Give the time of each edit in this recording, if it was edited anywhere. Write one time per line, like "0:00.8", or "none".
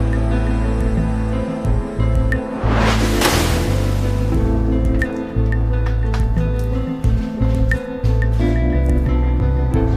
0:05.6

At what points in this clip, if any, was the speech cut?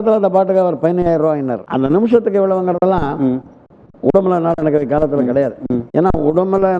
0:01.6

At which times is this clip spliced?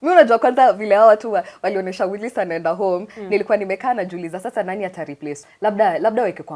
0:05.4

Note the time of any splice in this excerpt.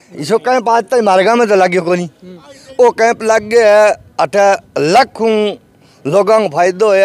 none

